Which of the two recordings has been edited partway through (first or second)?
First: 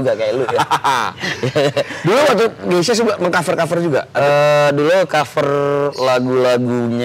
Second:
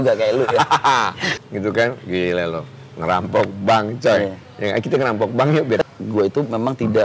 second